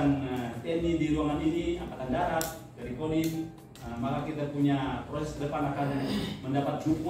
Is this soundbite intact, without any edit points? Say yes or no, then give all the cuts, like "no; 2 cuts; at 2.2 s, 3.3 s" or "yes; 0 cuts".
yes; 0 cuts